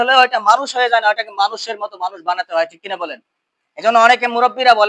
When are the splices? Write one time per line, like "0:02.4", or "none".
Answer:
none